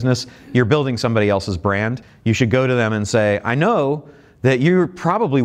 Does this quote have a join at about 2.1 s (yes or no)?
yes